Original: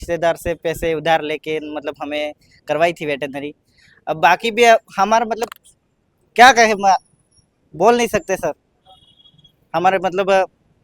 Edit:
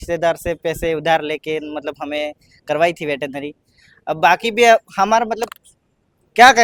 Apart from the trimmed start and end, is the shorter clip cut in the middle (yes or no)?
no